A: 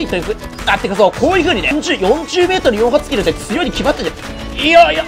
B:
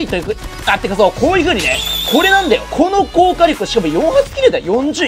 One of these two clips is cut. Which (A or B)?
A